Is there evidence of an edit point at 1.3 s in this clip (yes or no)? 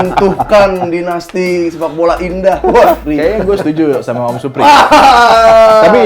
no